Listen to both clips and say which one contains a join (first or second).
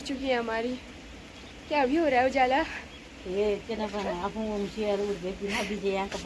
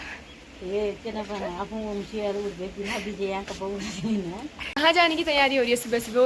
second